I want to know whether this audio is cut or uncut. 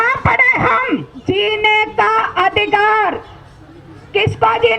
cut